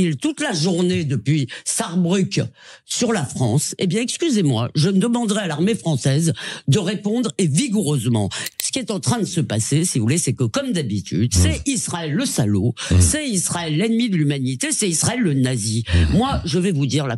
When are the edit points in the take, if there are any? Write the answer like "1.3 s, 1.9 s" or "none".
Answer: 8.4 s